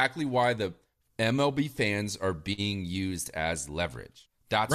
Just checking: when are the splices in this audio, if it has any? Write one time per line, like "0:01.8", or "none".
none